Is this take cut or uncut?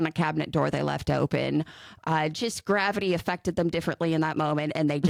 uncut